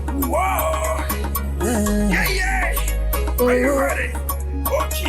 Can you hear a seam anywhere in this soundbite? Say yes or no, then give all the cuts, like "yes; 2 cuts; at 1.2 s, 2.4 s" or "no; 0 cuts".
yes; 1 cut; at 2.4 s